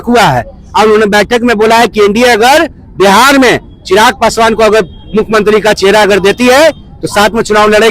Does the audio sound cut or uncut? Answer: uncut